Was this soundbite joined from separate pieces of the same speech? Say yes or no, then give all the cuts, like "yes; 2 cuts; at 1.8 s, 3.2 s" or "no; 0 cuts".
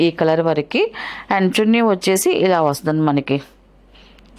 no; 0 cuts